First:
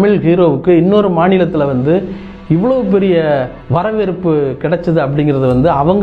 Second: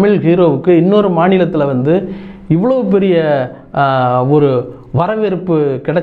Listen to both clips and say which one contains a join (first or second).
first